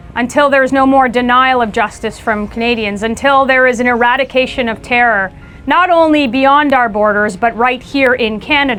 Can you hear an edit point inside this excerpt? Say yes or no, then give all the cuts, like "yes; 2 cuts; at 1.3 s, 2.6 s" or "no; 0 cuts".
no; 0 cuts